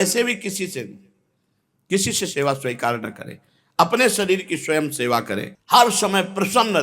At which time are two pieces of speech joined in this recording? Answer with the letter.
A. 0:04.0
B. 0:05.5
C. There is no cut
B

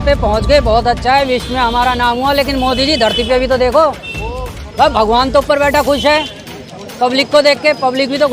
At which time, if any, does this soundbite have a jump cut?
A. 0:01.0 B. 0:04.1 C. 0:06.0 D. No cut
D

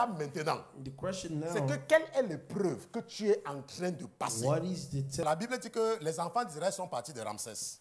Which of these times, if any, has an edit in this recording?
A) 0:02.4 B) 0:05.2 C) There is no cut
B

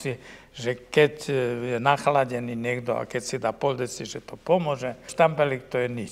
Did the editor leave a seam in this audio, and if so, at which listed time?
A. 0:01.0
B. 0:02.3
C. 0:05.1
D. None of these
C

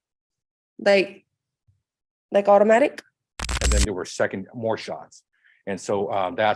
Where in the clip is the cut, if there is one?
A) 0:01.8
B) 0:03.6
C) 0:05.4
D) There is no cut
B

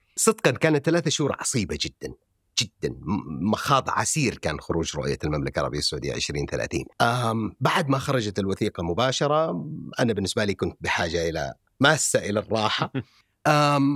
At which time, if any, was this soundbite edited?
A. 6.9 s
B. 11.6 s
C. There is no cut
C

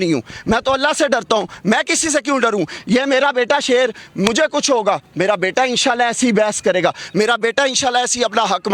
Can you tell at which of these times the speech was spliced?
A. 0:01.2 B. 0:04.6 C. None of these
C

